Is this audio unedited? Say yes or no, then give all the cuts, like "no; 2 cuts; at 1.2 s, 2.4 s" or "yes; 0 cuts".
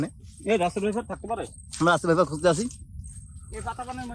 yes; 0 cuts